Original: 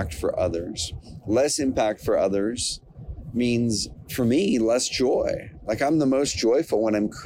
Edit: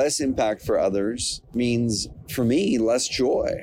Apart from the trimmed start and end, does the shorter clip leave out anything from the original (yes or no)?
yes